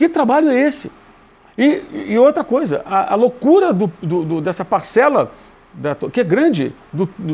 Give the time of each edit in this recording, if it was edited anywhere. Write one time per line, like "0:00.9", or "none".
none